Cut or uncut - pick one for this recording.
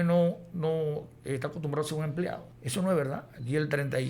cut